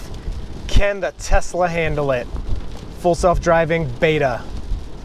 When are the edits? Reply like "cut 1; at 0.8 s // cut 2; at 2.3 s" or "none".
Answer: none